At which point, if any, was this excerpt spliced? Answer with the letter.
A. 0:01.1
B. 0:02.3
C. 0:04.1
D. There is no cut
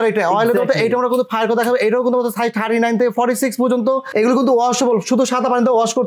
C